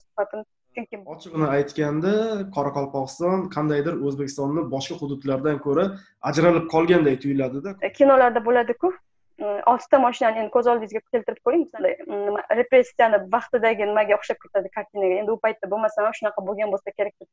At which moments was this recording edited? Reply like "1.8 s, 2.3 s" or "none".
1.1 s, 7.6 s, 11.7 s